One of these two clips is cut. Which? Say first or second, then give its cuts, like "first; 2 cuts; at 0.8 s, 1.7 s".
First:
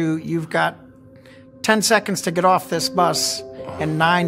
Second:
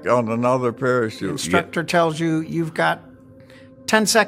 second; 1 cut; at 1.3 s